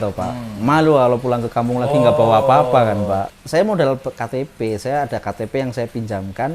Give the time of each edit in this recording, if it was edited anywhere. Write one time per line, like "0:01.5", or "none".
0:03.4